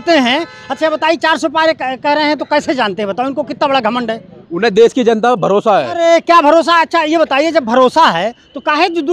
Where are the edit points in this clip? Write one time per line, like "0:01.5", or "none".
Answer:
none